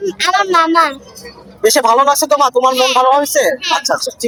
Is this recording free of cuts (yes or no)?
yes